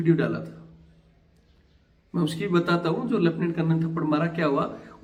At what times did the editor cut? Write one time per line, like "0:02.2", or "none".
none